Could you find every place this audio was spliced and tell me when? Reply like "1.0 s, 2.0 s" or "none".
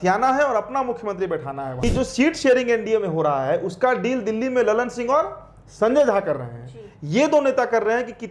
1.8 s